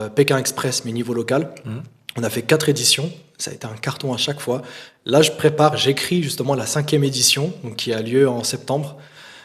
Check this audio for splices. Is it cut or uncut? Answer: uncut